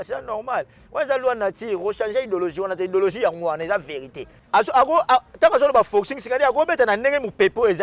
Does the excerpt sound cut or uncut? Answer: cut